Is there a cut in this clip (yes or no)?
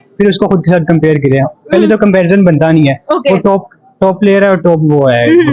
no